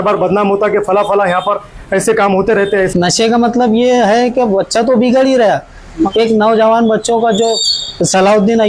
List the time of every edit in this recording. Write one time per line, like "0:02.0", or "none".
0:02.9
0:06.1